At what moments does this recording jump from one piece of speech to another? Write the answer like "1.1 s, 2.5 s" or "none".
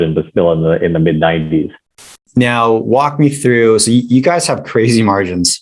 2.2 s